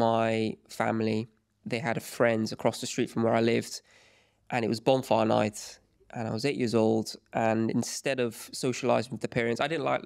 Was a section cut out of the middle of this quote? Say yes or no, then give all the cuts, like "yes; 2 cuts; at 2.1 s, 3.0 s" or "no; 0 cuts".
no; 0 cuts